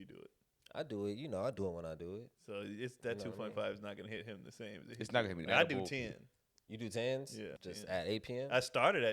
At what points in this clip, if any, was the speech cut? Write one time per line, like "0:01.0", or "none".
0:02.3
0:05.4
0:07.5